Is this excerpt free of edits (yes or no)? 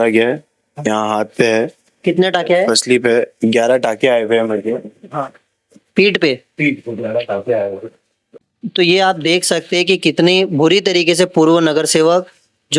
yes